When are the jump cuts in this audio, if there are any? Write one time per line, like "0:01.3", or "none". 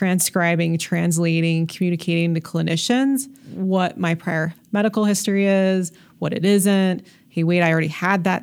0:03.4